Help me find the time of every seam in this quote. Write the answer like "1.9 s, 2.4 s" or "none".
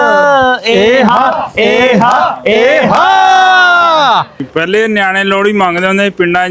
4.5 s